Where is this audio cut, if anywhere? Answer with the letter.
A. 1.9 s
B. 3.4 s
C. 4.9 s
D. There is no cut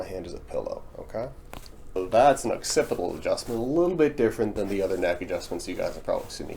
A